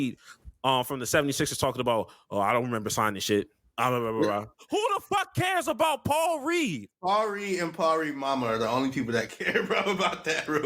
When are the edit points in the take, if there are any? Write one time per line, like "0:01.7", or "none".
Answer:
0:03.6
0:04.6
0:06.9